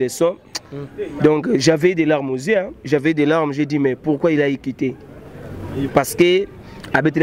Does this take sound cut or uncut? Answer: cut